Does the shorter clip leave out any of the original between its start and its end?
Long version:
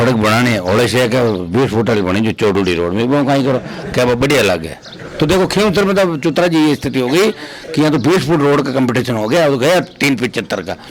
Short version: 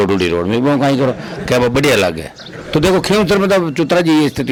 no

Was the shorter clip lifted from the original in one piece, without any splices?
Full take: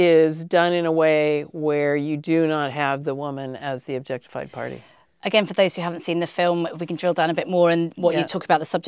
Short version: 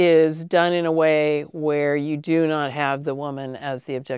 yes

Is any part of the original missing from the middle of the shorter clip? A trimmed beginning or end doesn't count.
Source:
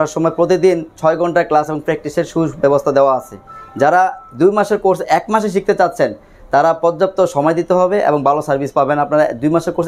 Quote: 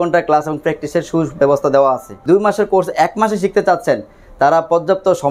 yes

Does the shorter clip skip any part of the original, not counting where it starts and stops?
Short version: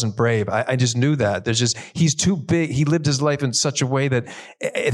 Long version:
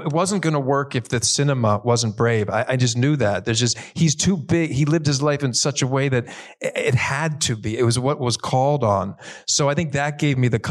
no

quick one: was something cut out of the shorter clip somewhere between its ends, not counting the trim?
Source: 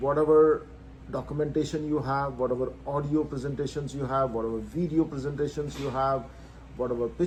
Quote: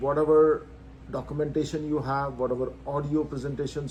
no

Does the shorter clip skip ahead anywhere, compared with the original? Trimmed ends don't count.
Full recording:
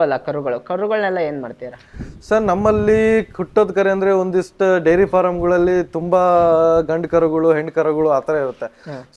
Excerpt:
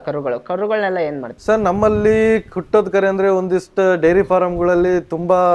yes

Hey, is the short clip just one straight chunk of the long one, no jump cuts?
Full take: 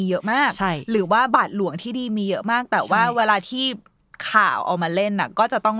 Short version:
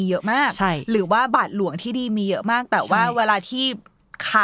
yes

